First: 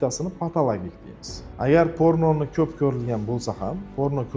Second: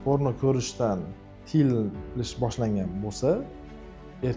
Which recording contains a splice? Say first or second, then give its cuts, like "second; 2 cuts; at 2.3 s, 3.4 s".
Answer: first; 1 cut; at 1.4 s